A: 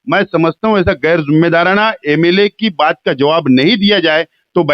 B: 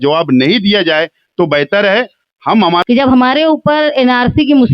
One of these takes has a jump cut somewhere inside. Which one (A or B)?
B